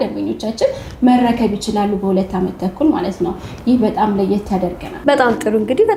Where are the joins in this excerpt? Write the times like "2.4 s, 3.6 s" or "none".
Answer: none